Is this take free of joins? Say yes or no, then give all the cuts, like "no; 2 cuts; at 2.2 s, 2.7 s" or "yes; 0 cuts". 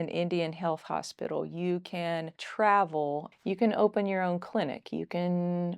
no; 2 cuts; at 2.4 s, 3.3 s